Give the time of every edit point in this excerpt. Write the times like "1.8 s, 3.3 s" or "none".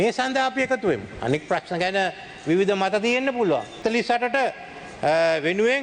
3.8 s